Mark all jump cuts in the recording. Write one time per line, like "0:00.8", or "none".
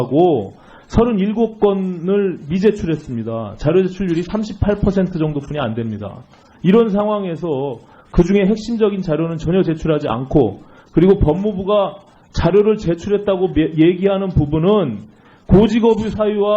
0:05.6